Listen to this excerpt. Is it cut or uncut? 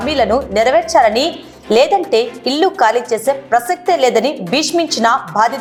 uncut